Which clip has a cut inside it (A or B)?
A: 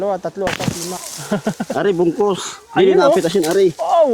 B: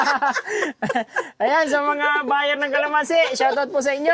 A